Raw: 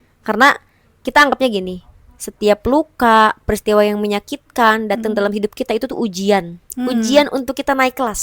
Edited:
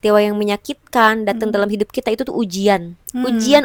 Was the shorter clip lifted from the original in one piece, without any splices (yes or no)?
yes